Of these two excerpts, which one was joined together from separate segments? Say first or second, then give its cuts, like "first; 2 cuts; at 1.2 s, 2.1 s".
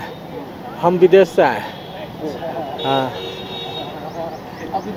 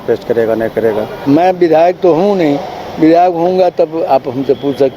second; 1 cut; at 1.2 s